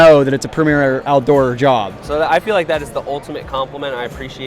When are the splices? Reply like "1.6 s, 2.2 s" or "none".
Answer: 2.0 s